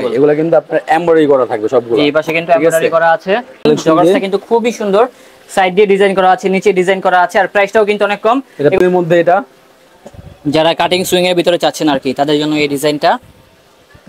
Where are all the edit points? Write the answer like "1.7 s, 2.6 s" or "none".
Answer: 3.6 s, 8.8 s